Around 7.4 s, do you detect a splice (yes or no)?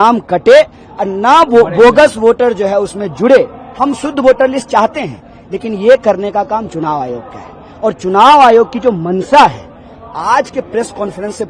no